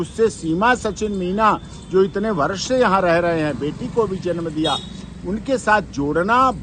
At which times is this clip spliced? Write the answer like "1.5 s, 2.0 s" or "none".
none